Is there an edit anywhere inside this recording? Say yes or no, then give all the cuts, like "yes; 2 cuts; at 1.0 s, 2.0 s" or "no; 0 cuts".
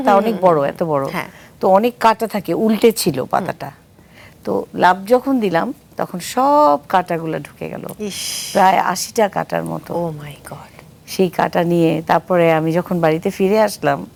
no; 0 cuts